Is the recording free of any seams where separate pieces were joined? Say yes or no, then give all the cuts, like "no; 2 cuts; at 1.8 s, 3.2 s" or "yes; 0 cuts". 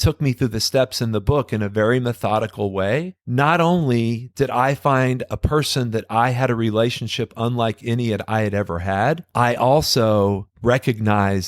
no; 3 cuts; at 3.2 s, 9.3 s, 10.5 s